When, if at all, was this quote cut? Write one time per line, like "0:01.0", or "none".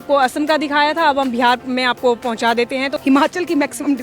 0:02.9